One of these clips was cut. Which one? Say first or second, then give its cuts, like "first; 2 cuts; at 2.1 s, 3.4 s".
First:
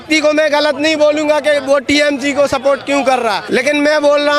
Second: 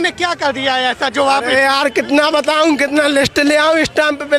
first; 1 cut; at 3.4 s